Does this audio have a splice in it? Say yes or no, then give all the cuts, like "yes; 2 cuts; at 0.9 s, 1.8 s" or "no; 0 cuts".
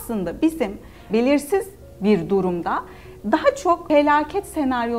yes; 2 cuts; at 1.1 s, 3.8 s